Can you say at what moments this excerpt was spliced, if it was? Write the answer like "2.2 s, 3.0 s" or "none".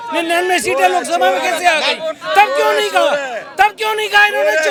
none